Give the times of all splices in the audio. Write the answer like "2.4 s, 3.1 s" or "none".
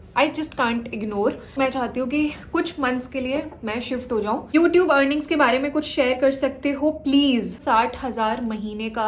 1.5 s, 4.5 s, 7.6 s